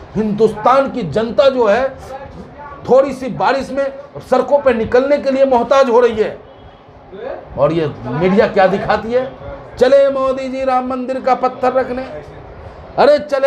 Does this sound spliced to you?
no; 0 cuts

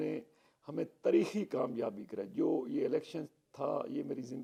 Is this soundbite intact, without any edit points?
yes; 0 cuts

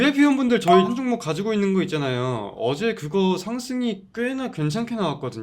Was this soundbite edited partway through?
yes; 1 cut; at 0.9 s

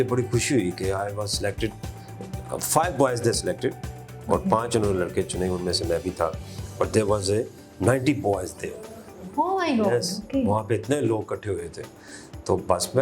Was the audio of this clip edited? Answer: no; 0 cuts

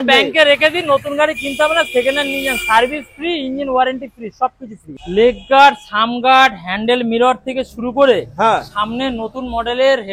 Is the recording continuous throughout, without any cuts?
no; 1 cut; at 5.0 s

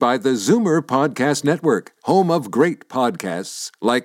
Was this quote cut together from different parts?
no; 0 cuts

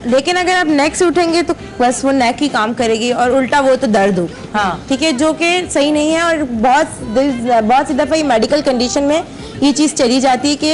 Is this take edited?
yes; 1 cut; at 8.2 s

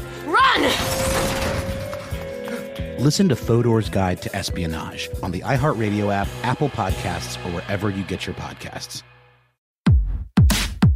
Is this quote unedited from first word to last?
no; 1 cut; at 9.9 s

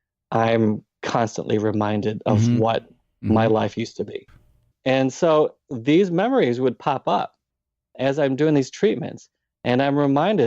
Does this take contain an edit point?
yes; 2 cuts; at 4.7 s, 7.9 s

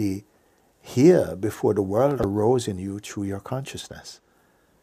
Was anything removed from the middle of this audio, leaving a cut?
yes; 1 cut; at 2.2 s

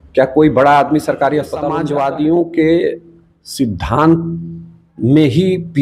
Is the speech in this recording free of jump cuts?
no; 1 cut; at 1.8 s

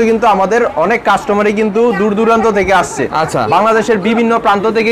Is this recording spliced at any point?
no; 0 cuts

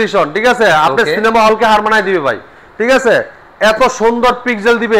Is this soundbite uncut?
yes; 0 cuts

